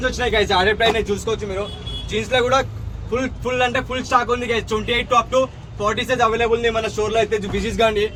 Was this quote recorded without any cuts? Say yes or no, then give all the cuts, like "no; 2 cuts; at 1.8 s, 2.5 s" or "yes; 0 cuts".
yes; 0 cuts